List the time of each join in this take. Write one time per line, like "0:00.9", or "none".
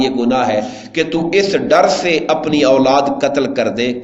none